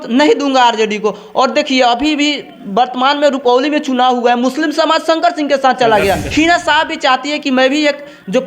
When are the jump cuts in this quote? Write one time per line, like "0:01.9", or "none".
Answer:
0:06.2